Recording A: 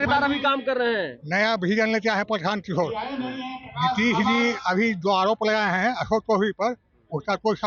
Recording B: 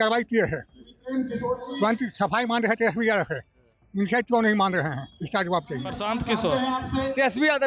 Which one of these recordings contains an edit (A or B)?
B